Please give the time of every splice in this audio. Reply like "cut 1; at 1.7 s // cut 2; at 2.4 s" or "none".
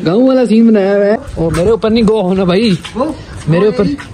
cut 1; at 1.2 s